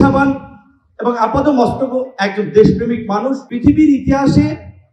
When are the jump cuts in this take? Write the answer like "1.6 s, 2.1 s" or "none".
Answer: 3.5 s

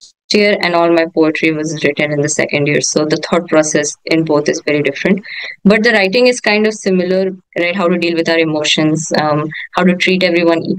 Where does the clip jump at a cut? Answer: 7.4 s

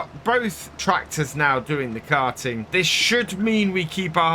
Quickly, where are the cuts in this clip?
0.8 s, 2.7 s

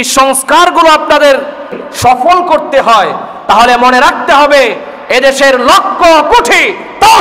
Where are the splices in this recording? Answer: 1.8 s

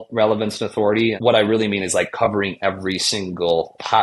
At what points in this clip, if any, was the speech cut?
1.2 s

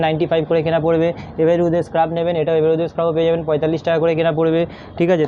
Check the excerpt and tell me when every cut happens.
none

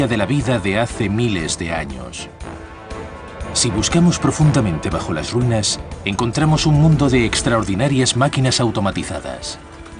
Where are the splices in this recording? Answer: 4.4 s

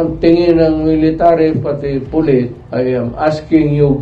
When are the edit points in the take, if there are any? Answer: 2.6 s

